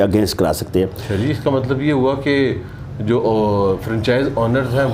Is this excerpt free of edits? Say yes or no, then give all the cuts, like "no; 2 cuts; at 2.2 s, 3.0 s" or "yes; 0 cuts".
yes; 0 cuts